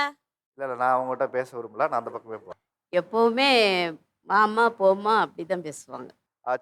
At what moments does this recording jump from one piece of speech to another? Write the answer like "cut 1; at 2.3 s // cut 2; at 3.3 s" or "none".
cut 1; at 2.4 s